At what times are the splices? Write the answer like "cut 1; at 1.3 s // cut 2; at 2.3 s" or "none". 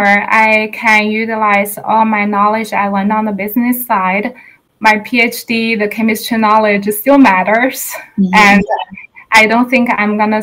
cut 1; at 4.5 s